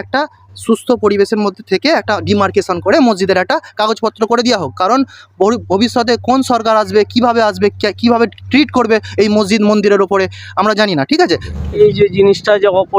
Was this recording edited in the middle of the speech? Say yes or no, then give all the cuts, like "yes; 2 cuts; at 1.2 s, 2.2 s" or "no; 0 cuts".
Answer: yes; 1 cut; at 11.5 s